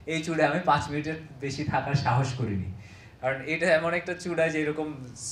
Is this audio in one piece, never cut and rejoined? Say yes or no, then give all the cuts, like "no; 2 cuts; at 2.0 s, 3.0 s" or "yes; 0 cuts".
yes; 0 cuts